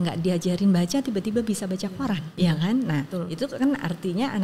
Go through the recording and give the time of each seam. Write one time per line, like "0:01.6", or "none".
0:02.3